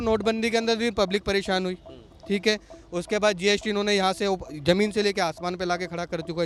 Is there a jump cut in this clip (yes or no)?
no